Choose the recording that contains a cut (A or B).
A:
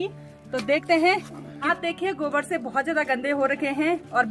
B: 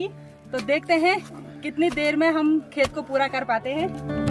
A